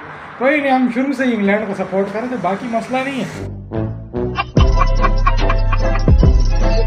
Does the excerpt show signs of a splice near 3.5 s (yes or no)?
yes